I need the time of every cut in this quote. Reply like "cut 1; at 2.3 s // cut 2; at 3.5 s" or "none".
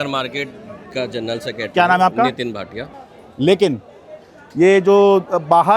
cut 1; at 2.9 s